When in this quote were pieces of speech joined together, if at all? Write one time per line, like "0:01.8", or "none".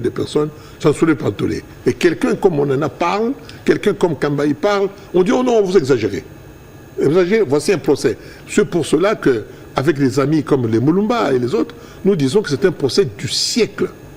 none